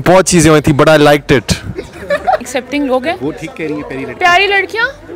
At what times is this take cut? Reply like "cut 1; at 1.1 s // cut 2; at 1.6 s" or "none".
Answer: cut 1; at 2.4 s